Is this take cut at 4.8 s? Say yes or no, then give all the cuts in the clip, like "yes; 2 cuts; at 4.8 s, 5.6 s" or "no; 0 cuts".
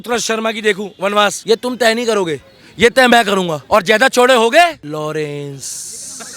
yes; 3 cuts; at 1.4 s, 3.6 s, 4.8 s